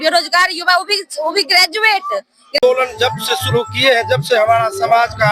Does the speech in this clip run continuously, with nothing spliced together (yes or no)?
no